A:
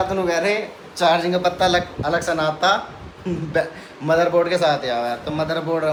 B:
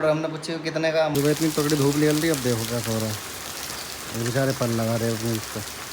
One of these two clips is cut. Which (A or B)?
B